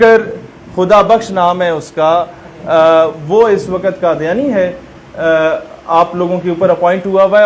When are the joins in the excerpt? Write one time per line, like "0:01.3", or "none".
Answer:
none